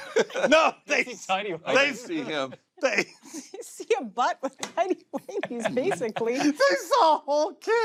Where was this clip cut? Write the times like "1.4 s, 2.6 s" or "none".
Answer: none